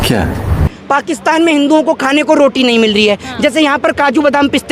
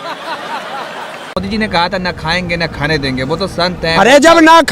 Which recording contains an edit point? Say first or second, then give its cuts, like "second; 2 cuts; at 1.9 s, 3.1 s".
second; 1 cut; at 1.3 s